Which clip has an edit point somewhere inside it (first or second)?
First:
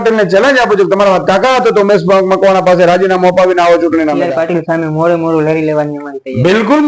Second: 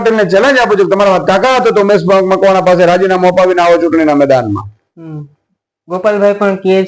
first